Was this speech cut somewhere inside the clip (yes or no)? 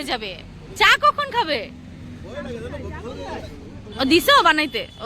no